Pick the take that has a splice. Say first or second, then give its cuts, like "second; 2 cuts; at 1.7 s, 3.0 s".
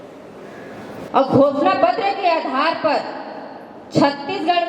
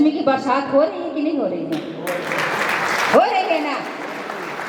first; 1 cut; at 1.0 s